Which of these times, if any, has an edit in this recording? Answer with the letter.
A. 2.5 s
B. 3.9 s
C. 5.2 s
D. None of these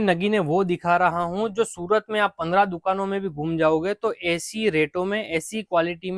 D